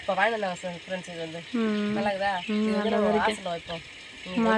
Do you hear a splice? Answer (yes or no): no